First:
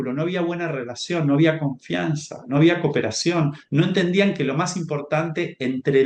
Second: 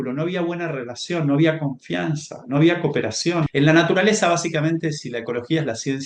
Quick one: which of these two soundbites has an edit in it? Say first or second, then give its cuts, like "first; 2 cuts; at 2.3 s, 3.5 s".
second; 1 cut; at 3.5 s